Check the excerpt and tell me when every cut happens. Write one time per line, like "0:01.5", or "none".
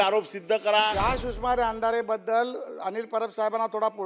0:00.9